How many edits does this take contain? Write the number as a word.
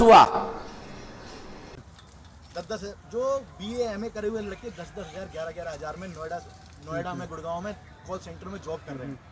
one